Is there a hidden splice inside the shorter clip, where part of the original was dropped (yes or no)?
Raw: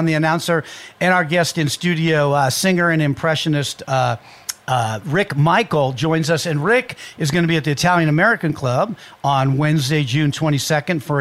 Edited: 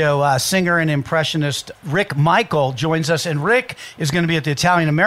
yes